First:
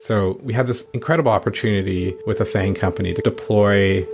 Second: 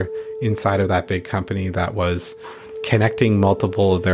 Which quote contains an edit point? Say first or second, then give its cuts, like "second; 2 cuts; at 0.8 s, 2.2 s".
first; 2 cuts; at 0.9 s, 2.2 s